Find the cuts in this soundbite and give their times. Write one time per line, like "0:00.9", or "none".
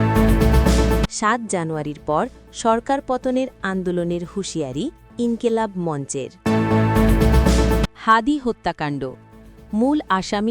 0:01.1
0:06.3
0:07.9